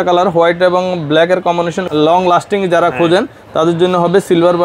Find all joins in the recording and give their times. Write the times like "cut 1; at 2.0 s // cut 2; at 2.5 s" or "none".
cut 1; at 1.8 s